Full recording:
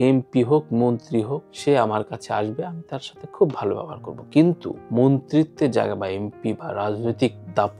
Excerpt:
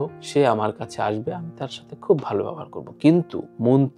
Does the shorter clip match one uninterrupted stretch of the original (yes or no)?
yes